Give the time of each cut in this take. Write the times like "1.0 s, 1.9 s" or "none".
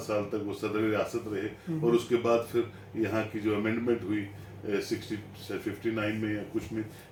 none